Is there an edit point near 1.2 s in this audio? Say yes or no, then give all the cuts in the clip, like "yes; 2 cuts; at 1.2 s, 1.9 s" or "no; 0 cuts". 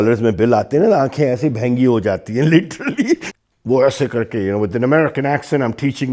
no; 1 cut; at 3.3 s